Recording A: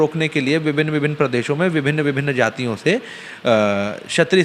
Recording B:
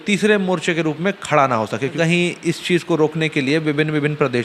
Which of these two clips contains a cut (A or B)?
B